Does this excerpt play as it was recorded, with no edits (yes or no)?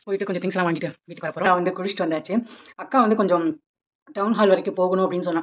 no